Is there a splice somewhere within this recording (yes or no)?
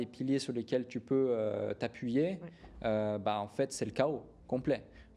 no